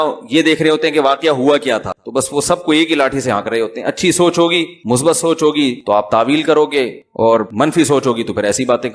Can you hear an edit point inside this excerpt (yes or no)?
yes